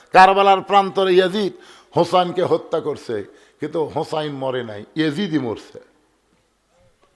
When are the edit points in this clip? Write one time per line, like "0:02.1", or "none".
none